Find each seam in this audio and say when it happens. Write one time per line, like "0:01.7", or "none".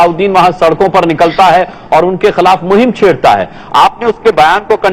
0:01.8